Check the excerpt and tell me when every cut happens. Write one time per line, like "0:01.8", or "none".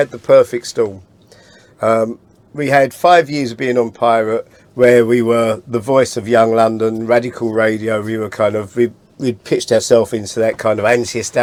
none